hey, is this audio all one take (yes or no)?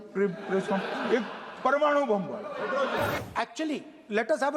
no